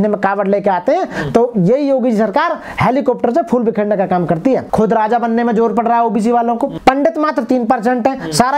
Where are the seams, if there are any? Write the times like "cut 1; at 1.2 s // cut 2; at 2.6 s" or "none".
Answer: cut 1; at 4.7 s // cut 2; at 6.8 s